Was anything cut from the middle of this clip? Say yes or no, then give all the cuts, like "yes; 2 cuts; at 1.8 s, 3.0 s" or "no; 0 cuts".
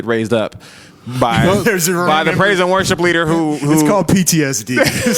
no; 0 cuts